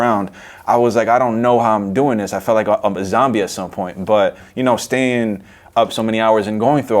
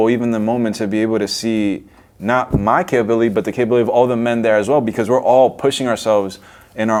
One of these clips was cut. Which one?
first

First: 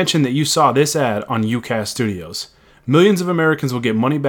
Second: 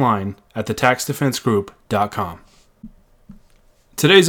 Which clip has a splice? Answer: second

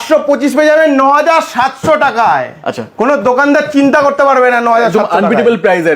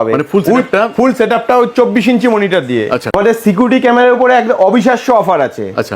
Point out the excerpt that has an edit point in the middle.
second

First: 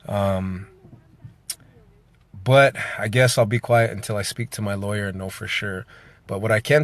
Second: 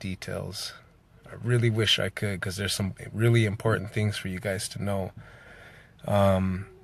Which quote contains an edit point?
second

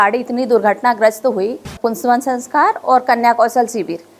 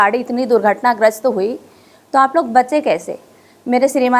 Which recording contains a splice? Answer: first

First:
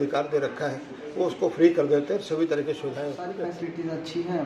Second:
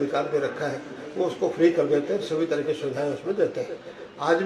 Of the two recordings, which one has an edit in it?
first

